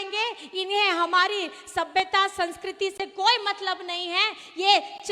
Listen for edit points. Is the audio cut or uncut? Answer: uncut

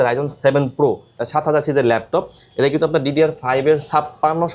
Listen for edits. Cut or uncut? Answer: cut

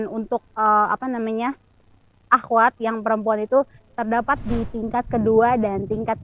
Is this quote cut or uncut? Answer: uncut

